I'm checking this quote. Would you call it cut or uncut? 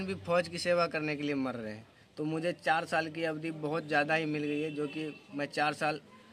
uncut